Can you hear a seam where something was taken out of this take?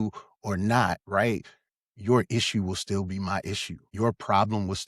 yes; 1 cut; at 3.9 s

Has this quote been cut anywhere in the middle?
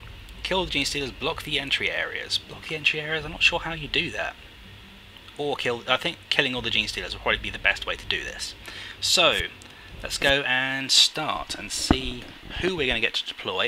no; 0 cuts

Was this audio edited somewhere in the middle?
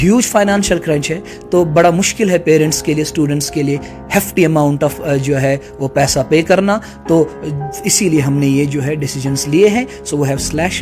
no; 0 cuts

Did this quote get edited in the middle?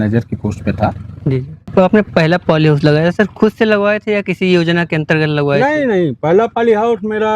yes; 1 cut; at 1.7 s

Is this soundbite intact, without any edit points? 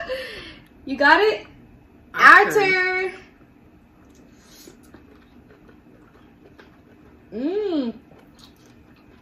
yes; 0 cuts

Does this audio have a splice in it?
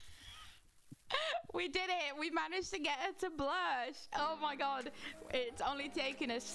no; 0 cuts

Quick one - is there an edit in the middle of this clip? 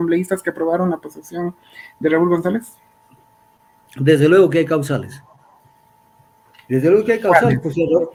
no; 0 cuts

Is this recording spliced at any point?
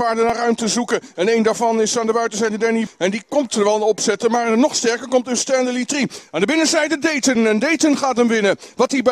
yes; 1 cut; at 2.9 s

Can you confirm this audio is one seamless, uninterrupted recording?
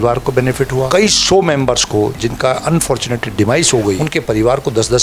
no; 2 cuts; at 0.9 s, 4.0 s

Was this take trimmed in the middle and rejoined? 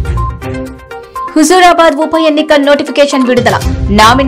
no; 0 cuts

